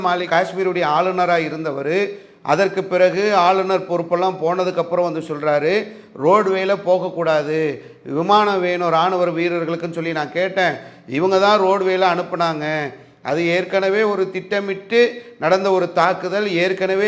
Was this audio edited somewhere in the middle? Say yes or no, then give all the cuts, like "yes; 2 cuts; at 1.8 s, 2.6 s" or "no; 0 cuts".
no; 0 cuts